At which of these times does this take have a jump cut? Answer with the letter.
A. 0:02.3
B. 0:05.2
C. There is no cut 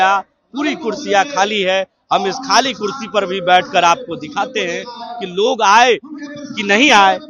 C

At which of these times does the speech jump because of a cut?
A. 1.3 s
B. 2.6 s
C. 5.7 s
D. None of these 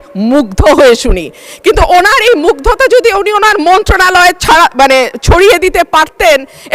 D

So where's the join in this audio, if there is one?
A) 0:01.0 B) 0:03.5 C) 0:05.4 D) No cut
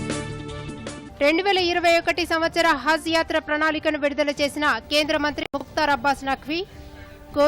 A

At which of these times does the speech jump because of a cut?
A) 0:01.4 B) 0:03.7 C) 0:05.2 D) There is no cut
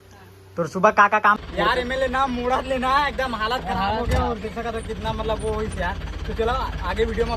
A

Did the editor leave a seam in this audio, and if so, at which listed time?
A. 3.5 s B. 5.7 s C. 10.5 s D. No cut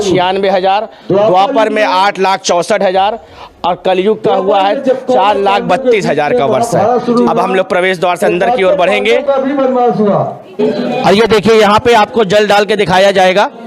C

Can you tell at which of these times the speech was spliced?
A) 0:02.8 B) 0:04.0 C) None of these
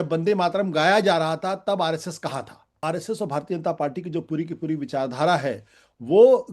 A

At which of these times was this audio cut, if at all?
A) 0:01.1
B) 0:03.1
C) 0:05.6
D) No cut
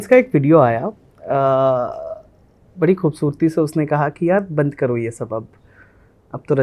D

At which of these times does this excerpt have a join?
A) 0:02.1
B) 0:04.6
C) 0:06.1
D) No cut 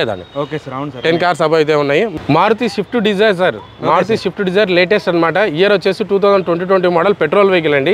A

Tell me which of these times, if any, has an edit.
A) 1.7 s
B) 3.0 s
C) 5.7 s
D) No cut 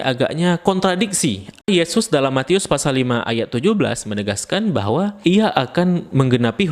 A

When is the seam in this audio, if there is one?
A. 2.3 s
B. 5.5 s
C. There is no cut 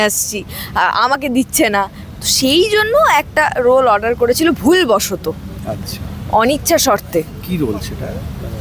C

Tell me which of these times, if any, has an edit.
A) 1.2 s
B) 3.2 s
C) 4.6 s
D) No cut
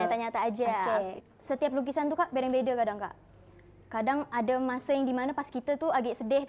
A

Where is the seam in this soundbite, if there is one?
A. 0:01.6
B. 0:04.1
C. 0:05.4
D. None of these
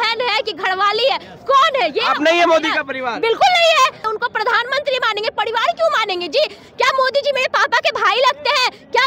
B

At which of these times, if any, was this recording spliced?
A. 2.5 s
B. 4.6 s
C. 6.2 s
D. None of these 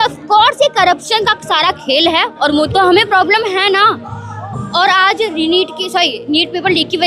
A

